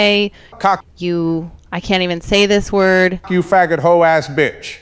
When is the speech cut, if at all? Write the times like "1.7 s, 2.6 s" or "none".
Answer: none